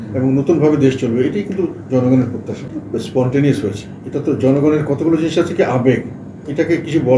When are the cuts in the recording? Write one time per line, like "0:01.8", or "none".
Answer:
none